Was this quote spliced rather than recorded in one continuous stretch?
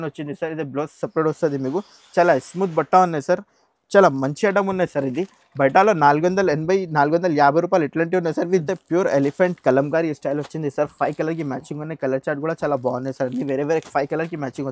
yes; 1 cut; at 8.7 s

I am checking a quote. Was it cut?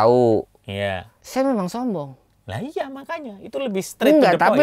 no; 0 cuts

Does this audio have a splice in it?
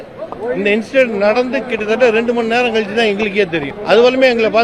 yes; 1 cut; at 3.7 s

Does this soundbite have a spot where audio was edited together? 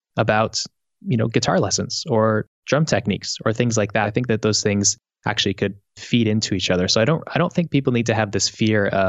yes; 1 cut; at 4.1 s

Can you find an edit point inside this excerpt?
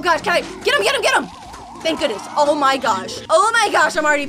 yes; 1 cut; at 3.1 s

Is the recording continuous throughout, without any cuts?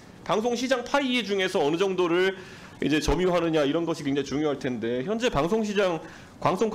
yes; 0 cuts

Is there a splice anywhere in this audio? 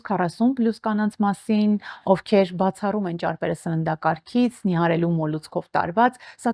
no; 0 cuts

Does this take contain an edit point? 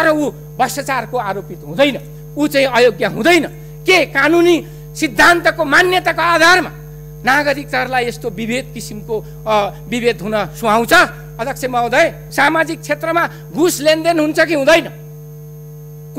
yes; 1 cut; at 12.2 s

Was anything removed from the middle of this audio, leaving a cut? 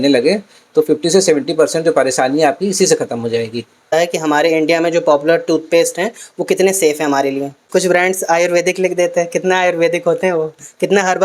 yes; 2 cuts; at 3.9 s, 7.6 s

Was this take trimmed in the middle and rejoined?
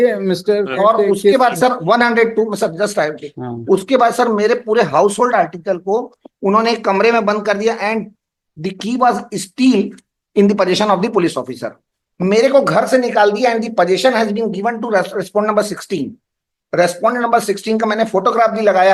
no; 0 cuts

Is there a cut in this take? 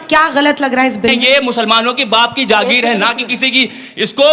yes; 1 cut; at 1.2 s

